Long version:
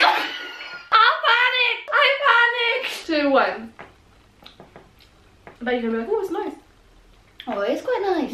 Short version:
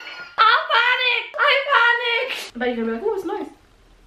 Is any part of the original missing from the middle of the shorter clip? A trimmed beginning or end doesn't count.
yes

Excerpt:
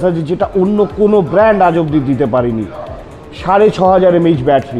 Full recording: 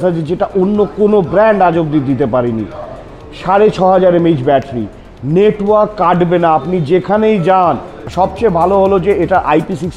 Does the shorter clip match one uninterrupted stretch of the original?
yes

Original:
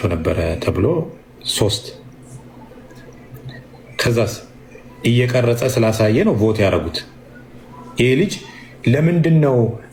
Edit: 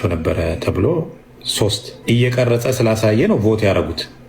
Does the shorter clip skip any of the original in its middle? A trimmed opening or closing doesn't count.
yes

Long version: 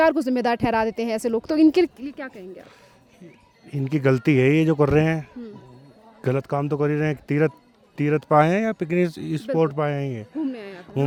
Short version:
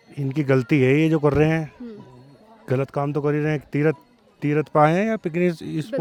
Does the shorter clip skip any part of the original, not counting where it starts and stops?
no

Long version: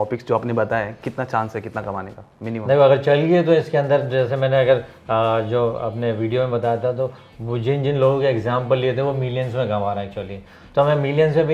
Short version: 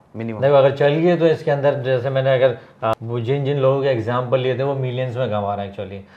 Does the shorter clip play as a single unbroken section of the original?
no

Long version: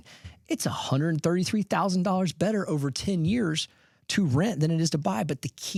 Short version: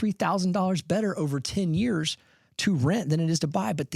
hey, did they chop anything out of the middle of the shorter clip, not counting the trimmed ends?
no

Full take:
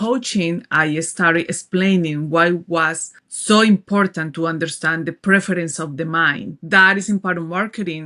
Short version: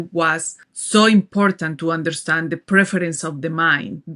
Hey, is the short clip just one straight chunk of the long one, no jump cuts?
yes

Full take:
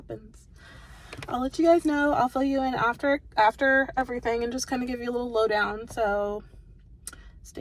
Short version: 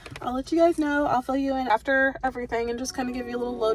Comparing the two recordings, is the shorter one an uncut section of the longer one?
no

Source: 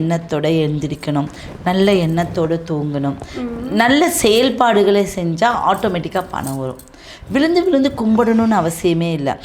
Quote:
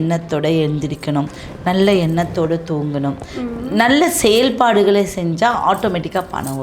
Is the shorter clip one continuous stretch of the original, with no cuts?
yes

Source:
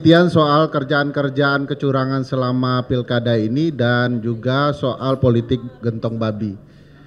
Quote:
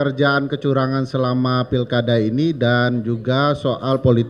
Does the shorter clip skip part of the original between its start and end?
no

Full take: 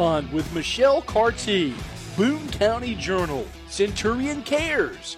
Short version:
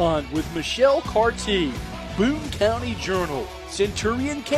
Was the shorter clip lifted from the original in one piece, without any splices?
yes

